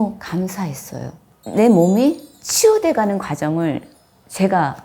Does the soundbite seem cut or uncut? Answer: cut